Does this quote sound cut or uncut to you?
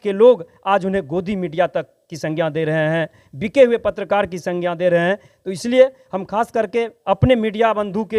uncut